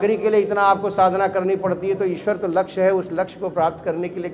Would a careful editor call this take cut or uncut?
uncut